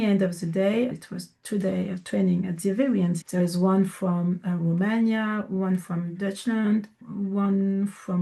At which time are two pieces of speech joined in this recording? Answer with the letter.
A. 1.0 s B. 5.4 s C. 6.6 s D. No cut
D